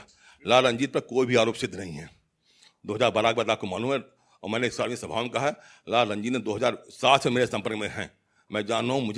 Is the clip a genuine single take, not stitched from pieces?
yes; 0 cuts

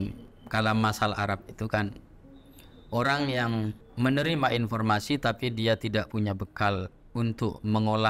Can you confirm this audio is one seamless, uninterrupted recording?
no; 1 cut; at 3.8 s

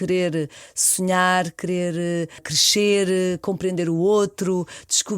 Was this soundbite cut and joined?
yes; 1 cut; at 2.5 s

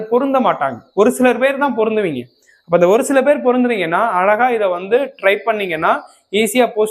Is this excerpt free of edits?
yes; 0 cuts

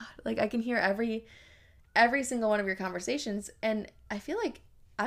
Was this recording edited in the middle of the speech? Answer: no; 0 cuts

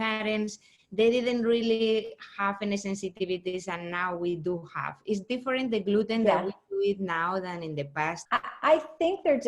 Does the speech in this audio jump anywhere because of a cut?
yes; 1 cut; at 8.2 s

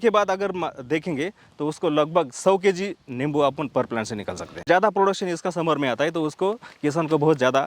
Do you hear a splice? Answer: yes; 1 cut; at 4.6 s

